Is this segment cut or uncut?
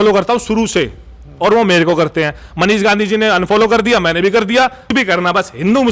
cut